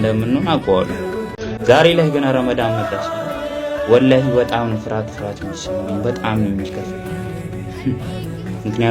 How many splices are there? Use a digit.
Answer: 1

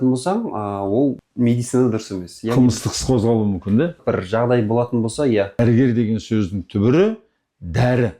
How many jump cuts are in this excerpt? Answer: 3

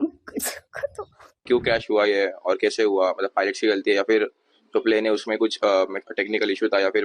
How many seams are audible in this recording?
1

